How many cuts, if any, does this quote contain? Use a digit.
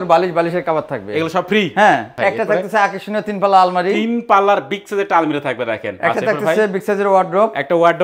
1